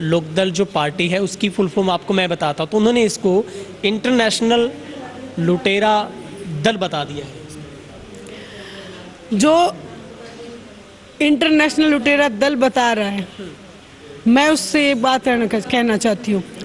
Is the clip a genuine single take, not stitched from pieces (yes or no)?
yes